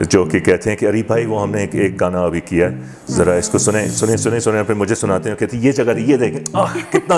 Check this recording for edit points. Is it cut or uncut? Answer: uncut